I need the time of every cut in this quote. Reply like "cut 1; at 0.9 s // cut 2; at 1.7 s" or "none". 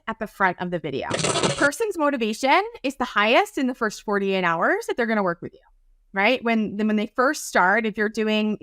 cut 1; at 1.2 s